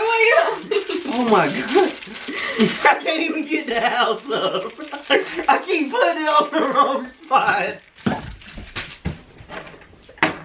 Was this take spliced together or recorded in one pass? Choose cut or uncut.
uncut